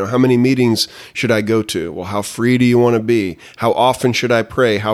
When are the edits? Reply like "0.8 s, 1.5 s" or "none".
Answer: none